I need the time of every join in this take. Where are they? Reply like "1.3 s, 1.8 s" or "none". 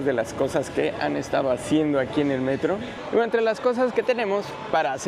2.9 s